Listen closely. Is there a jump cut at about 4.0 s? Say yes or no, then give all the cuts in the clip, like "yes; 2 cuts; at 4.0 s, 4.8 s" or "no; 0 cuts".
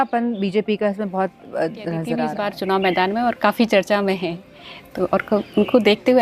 no; 1 cut; at 2.4 s